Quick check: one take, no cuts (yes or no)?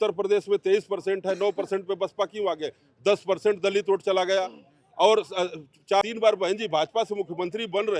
no